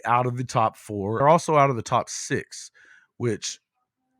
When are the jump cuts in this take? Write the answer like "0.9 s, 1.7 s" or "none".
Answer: 1.2 s